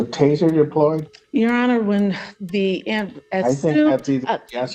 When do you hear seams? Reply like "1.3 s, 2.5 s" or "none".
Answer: 1.1 s